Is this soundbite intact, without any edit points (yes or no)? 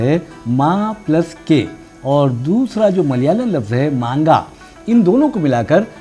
yes